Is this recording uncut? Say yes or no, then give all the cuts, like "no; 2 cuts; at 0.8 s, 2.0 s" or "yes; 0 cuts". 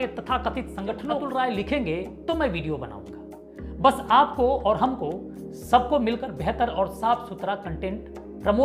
no; 1 cut; at 1.2 s